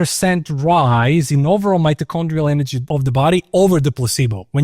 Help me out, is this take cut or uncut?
cut